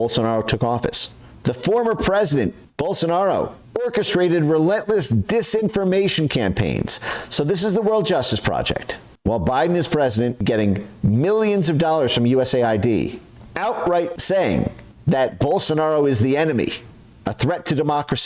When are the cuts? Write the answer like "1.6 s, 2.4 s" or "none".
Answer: 14.2 s